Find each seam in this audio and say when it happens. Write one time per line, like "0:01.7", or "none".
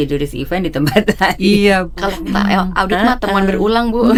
none